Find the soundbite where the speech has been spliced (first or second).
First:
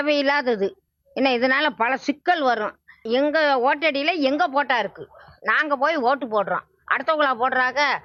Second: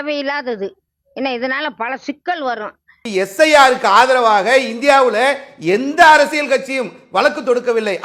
second